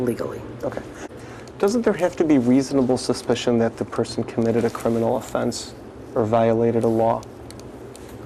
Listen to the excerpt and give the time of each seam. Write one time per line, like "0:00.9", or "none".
0:01.0

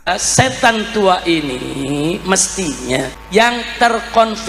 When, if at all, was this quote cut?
0:03.2

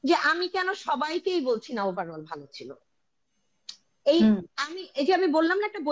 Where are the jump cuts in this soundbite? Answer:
none

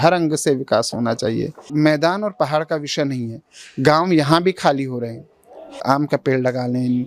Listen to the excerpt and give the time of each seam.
0:01.6
0:05.8

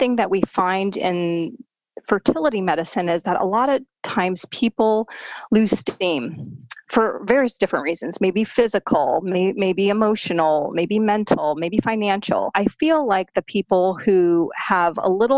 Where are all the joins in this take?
0:12.5

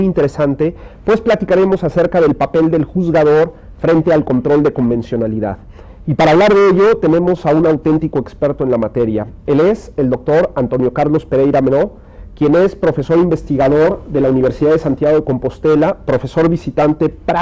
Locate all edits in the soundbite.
none

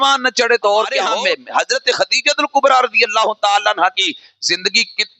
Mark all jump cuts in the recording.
0:01.1

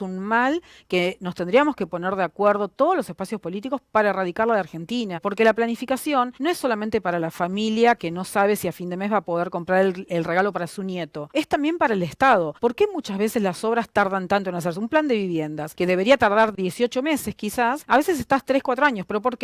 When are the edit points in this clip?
0:05.3
0:06.3
0:11.2
0:12.5
0:15.6
0:17.8

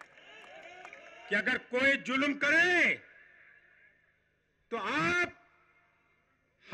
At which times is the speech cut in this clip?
0:01.3

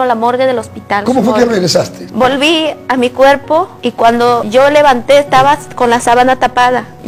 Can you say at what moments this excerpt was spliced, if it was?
none

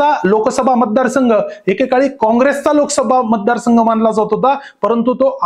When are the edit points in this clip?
none

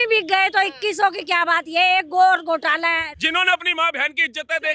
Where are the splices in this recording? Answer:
0:03.1

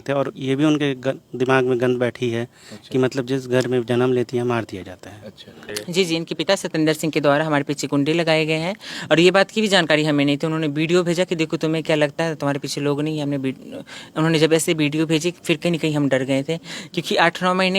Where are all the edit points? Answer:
0:05.7

